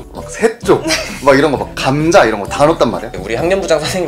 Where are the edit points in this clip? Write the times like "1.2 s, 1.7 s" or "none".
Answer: 3.1 s